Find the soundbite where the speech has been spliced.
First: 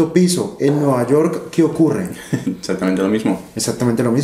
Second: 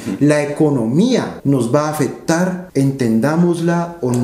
second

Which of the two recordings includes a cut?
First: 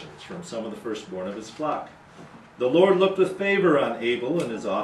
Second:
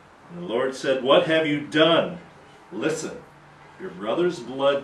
second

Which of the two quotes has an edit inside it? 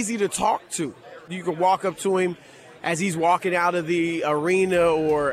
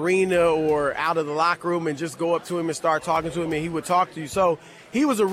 first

